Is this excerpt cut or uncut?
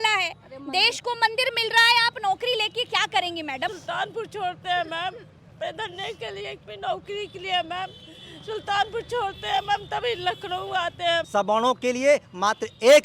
cut